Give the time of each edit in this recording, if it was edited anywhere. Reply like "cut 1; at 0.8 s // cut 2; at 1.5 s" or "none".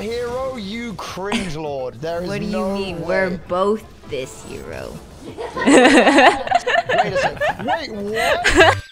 none